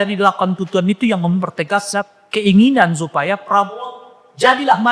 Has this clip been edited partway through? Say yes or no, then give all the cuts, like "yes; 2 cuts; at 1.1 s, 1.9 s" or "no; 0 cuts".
no; 0 cuts